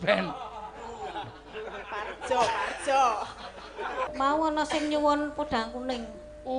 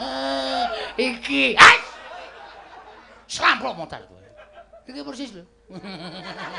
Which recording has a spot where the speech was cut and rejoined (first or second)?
first